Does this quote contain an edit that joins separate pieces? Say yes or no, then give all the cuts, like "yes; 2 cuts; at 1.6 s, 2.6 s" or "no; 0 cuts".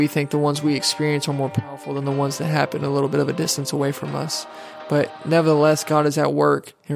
no; 0 cuts